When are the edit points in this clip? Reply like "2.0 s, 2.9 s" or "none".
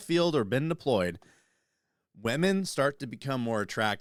none